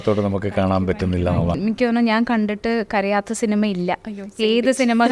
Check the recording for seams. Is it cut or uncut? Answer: cut